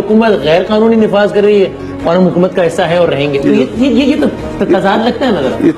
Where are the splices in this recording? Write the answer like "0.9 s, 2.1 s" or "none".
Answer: none